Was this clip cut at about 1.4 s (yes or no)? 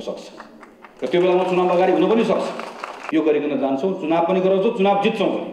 no